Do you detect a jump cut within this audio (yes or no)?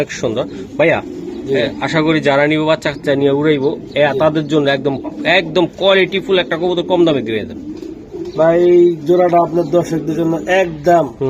no